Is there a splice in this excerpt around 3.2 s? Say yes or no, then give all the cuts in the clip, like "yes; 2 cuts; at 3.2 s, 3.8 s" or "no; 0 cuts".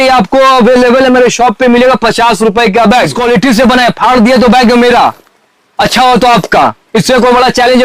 yes; 1 cut; at 3.2 s